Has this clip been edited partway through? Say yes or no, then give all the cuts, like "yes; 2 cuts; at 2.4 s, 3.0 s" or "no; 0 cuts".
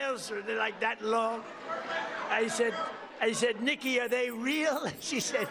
no; 0 cuts